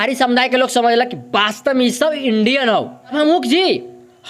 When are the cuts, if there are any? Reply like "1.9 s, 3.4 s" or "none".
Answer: 3.1 s